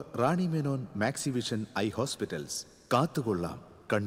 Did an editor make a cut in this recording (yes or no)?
no